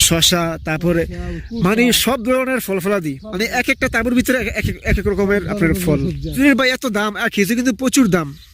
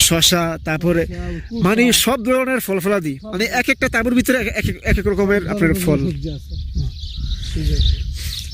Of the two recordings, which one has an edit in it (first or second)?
first